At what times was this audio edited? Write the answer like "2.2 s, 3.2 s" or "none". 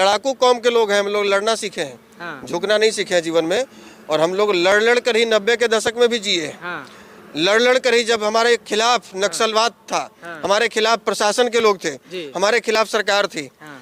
none